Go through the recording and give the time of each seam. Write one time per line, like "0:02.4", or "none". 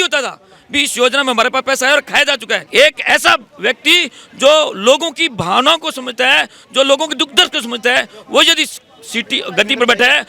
0:02.6